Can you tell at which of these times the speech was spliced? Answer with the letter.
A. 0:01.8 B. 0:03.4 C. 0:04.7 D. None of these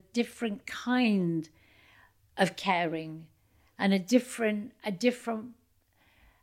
D